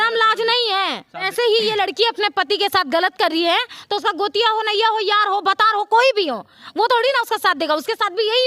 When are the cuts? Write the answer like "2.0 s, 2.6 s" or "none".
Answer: 1.3 s